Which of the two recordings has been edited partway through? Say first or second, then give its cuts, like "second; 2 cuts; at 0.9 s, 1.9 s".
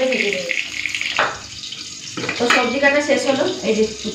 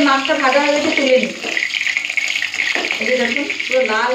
first; 1 cut; at 1.0 s